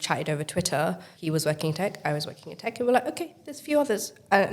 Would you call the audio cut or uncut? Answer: cut